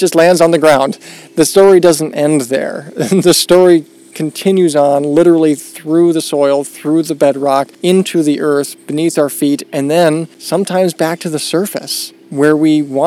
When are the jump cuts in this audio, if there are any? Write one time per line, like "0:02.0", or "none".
0:07.7
0:10.3